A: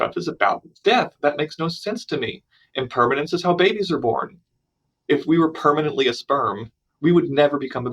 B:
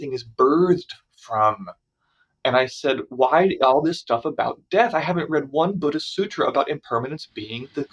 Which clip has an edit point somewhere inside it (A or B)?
A